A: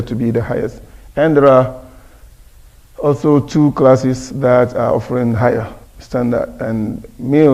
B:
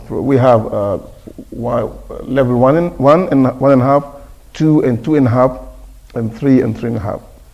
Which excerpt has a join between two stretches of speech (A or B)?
B